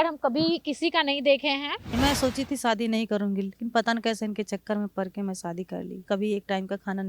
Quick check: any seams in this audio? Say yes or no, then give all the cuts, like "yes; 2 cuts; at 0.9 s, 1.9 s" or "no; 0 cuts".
yes; 2 cuts; at 1.9 s, 6.0 s